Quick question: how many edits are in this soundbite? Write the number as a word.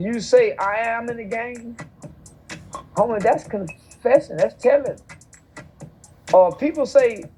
zero